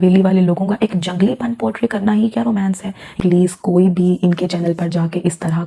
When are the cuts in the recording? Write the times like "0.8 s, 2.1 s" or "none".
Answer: 3.1 s